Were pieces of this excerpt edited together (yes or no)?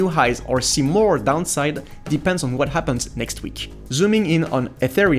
yes